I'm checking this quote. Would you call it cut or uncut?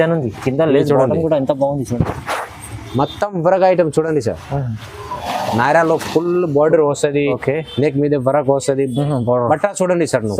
cut